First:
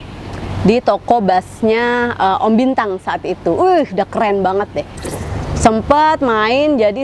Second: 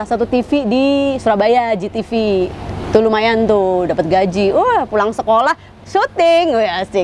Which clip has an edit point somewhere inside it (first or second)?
first